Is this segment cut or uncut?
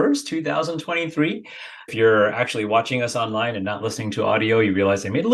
cut